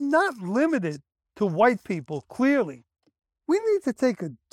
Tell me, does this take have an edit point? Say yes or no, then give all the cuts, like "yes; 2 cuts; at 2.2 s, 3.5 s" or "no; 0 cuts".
yes; 1 cut; at 2.9 s